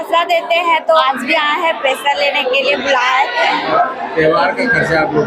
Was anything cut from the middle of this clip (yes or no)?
yes